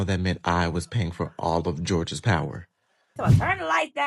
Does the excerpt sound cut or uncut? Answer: cut